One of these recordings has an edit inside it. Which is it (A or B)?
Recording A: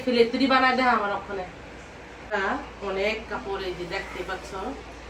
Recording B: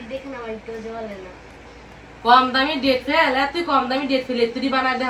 A